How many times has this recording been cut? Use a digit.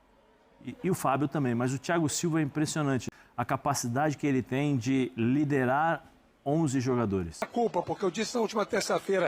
2